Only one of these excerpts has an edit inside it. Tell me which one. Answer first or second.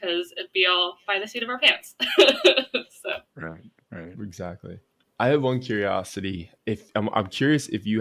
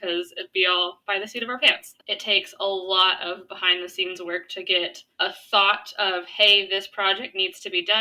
second